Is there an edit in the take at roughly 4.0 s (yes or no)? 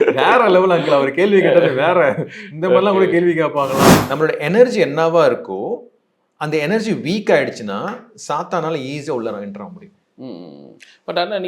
yes